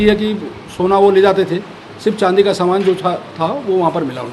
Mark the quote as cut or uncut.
uncut